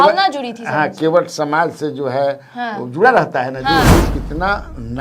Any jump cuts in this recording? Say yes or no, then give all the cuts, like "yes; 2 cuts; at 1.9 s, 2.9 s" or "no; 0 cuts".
yes; 1 cut; at 3.9 s